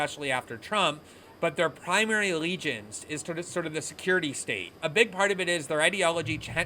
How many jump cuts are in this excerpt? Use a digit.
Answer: 1